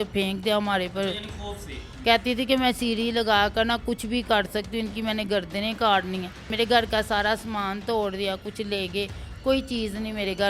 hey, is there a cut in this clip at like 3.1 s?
no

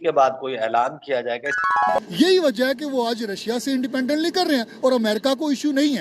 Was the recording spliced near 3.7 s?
no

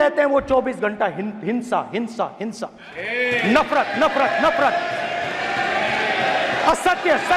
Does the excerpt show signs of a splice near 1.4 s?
no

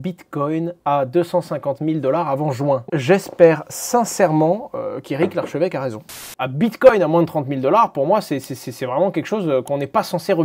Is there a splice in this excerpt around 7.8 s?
no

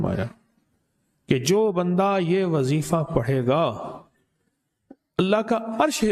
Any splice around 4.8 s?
no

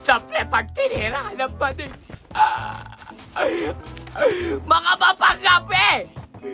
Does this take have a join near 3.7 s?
yes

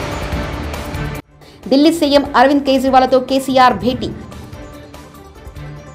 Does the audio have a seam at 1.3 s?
yes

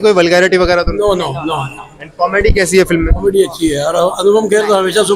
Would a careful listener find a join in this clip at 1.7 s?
no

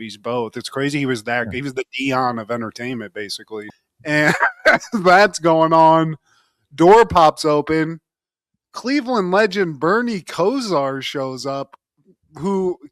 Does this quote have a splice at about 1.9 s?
no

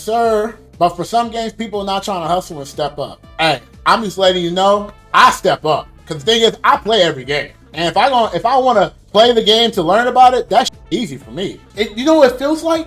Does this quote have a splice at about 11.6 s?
yes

